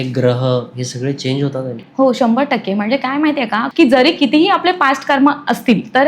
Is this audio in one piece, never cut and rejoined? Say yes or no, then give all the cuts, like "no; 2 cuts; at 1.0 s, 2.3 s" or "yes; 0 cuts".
no; 1 cut; at 3.7 s